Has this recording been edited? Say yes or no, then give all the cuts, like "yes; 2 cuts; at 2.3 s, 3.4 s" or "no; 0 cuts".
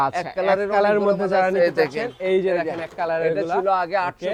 no; 0 cuts